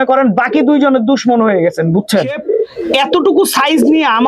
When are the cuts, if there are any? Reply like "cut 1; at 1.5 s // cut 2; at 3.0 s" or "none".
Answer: cut 1; at 2.7 s